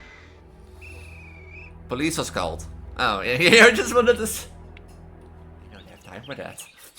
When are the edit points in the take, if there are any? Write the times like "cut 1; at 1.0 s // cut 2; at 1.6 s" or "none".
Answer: cut 1; at 6.0 s